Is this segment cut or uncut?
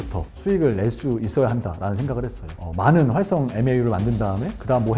uncut